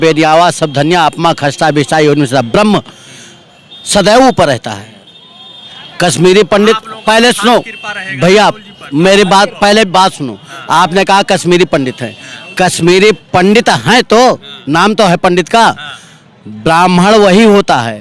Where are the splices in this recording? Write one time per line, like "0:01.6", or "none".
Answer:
none